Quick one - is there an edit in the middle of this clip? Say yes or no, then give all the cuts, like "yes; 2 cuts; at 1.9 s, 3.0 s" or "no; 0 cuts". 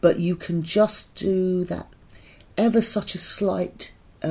no; 0 cuts